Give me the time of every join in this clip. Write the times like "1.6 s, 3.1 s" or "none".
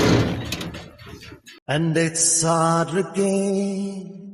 1.8 s